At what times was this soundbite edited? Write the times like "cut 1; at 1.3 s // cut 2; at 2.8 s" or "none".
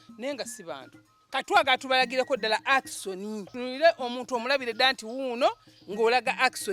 cut 1; at 1.1 s // cut 2; at 3.6 s

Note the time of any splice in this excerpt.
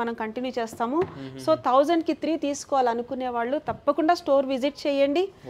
none

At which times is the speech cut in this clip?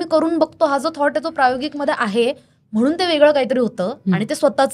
none

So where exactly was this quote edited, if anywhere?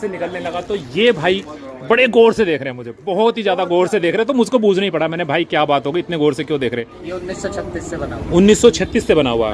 cut 1; at 7.0 s

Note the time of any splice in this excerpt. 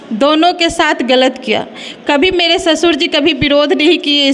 none

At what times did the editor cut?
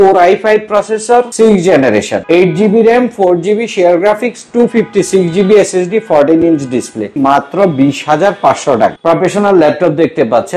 cut 1; at 1.3 s // cut 2; at 2.2 s // cut 3; at 7.1 s // cut 4; at 9.0 s

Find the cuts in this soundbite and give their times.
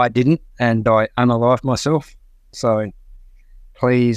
none

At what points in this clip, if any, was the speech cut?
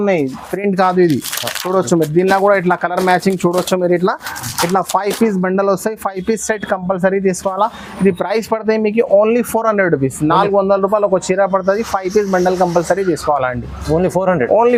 none

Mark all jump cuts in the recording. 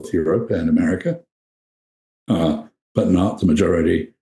none

